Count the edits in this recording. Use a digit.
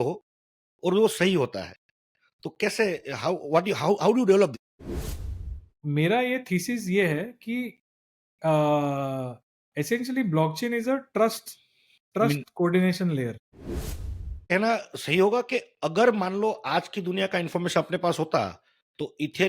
2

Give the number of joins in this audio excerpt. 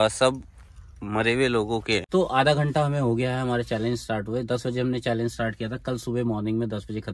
1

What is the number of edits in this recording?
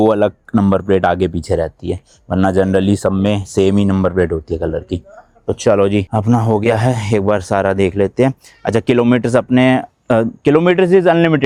0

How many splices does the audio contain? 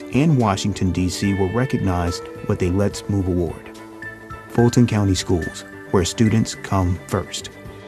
0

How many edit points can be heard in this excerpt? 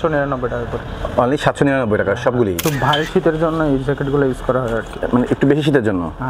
1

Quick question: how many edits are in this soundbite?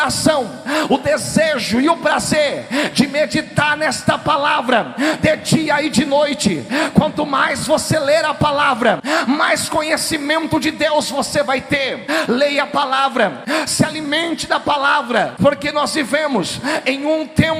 4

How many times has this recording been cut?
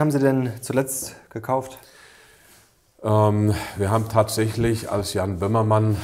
0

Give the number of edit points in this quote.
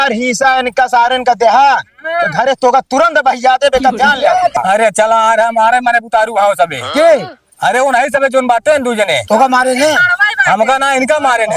1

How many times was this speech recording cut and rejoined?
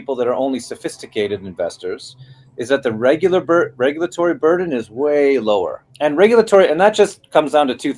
1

